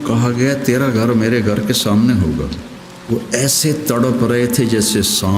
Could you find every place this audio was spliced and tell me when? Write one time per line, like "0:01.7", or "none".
0:02.9